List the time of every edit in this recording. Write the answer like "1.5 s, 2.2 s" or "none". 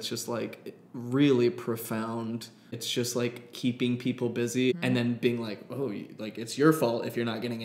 2.8 s, 4.7 s